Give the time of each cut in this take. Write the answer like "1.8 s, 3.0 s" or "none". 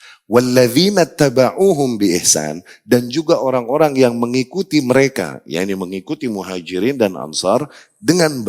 none